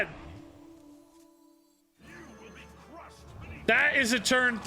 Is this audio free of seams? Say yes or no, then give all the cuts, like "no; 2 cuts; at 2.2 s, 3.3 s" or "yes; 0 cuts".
no; 1 cut; at 3.6 s